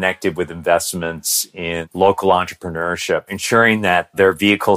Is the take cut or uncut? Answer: cut